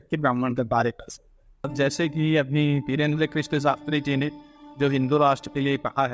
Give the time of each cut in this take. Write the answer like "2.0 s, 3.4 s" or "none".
1.7 s